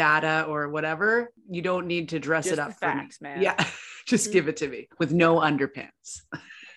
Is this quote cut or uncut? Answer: cut